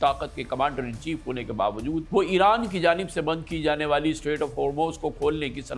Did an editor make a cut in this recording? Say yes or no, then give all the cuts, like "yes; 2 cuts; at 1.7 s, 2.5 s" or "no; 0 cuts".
yes; 1 cut; at 2.1 s